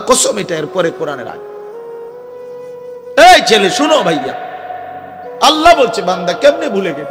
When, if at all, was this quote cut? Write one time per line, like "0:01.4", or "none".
0:01.3
0:03.2